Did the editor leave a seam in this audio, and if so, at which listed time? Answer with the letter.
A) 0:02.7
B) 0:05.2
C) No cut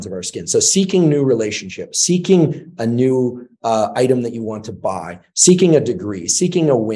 C